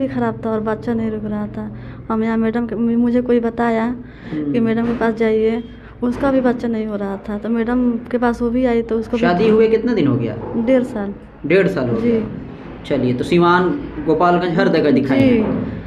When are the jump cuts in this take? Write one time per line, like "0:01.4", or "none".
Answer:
none